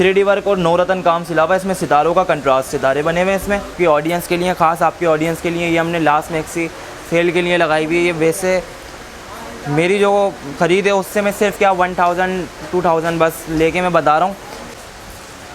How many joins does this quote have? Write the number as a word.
two